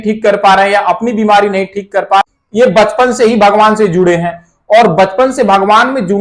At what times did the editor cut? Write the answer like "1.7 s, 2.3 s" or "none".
2.2 s